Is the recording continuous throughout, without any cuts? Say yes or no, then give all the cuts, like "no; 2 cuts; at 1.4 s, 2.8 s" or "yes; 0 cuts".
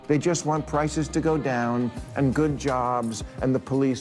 yes; 0 cuts